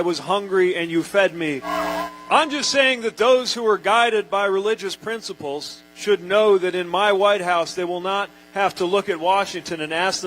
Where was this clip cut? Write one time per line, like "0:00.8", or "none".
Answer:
0:01.7